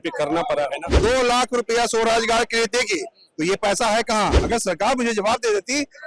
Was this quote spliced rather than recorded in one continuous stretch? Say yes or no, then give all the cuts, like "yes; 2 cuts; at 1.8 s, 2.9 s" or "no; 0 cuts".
yes; 2 cuts; at 0.8 s, 4.4 s